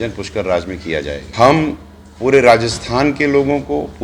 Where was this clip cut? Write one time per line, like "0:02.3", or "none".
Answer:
0:01.3